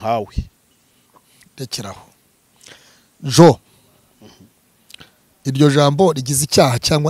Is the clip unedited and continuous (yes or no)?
yes